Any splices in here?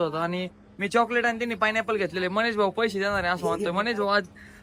no; 0 cuts

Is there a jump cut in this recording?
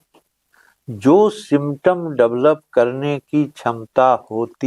no; 0 cuts

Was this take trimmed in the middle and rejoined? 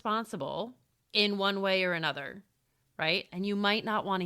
yes; 1 cut; at 3.3 s

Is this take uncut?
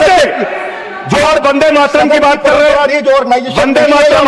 yes; 0 cuts

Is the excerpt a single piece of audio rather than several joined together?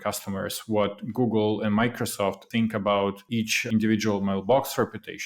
no; 2 cuts; at 2.4 s, 3.5 s

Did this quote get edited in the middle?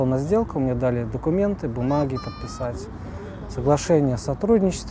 no; 0 cuts

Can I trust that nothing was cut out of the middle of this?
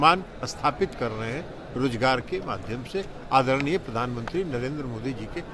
yes; 0 cuts

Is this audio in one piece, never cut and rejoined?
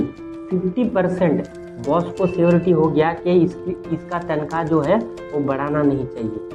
yes; 0 cuts

